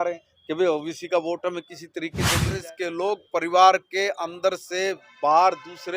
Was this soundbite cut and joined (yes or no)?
yes